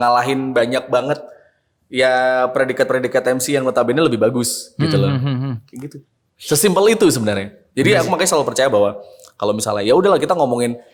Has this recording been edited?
no; 0 cuts

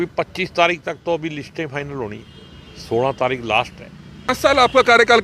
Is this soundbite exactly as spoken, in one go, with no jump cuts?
no; 1 cut; at 4.3 s

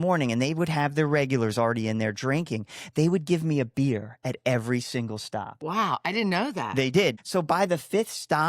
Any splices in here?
yes; 1 cut; at 7.2 s

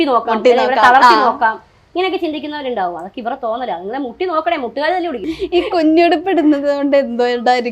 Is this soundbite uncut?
no; 1 cut; at 5.3 s

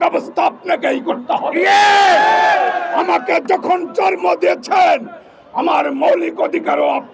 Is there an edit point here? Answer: no; 0 cuts

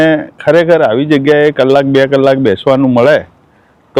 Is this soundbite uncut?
yes; 0 cuts

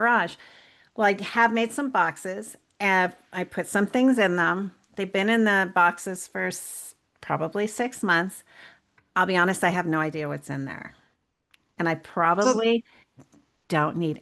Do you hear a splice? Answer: no; 0 cuts

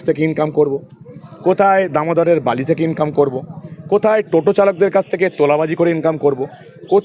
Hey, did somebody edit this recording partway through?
no; 0 cuts

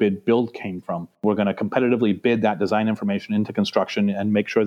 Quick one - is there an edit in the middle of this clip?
yes; 1 cut; at 1.2 s

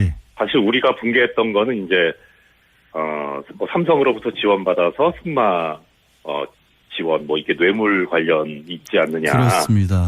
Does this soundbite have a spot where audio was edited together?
no; 0 cuts

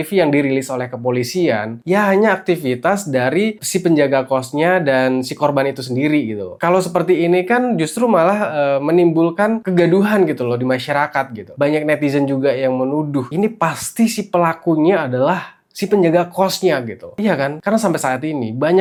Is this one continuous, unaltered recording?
yes; 0 cuts

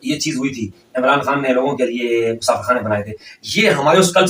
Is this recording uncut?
yes; 0 cuts

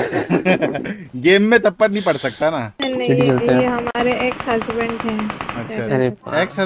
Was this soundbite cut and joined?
yes; 1 cut; at 2.7 s

